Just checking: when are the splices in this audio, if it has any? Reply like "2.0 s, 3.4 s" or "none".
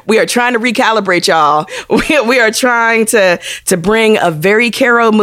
1.8 s

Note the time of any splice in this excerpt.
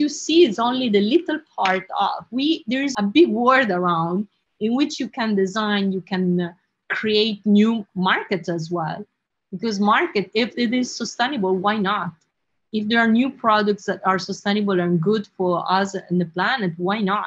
2.9 s

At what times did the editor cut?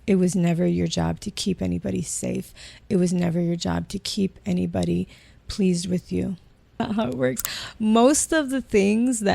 6.8 s

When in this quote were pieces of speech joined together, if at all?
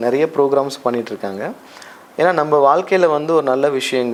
none

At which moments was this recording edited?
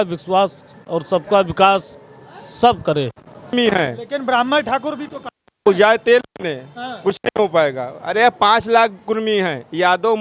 3.4 s

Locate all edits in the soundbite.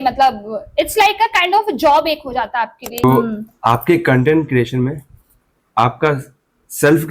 3.0 s

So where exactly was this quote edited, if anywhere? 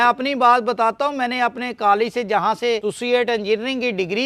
2.9 s

